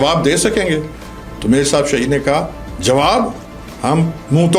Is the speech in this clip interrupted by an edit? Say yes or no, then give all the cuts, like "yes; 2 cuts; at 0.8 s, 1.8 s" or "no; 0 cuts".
no; 0 cuts